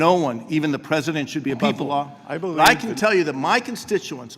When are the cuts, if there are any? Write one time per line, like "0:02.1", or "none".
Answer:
0:02.5